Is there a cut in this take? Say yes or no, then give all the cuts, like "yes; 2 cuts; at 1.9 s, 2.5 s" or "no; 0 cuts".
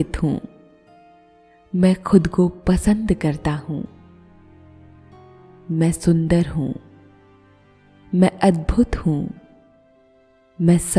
no; 0 cuts